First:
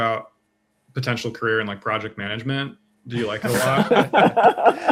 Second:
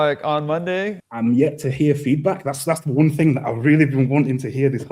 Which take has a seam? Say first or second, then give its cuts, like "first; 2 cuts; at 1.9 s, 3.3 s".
second; 1 cut; at 0.9 s